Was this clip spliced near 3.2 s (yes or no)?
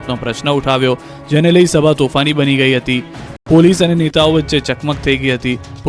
no